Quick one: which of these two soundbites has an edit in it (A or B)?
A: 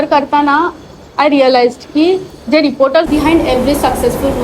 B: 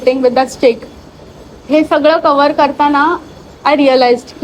A